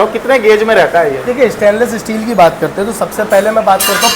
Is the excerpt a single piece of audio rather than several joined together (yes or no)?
yes